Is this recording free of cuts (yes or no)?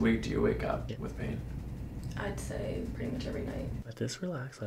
no